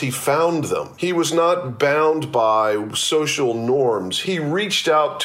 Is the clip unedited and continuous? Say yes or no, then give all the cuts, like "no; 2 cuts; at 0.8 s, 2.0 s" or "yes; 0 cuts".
no; 2 cuts; at 0.9 s, 4.1 s